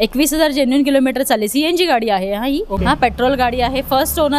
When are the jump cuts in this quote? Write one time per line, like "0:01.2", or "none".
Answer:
0:02.8